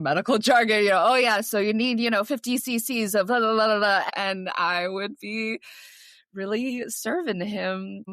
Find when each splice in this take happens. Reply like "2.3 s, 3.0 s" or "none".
4.0 s